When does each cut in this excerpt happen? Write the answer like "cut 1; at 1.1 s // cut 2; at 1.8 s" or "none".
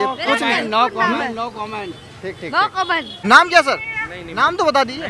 cut 1; at 3.1 s